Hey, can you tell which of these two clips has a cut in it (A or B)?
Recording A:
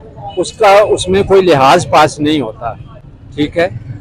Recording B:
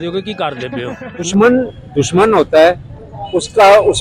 B